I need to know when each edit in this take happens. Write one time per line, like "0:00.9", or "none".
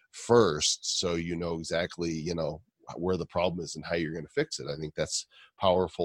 none